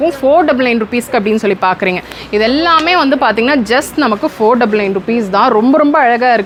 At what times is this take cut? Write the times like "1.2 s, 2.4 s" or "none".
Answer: none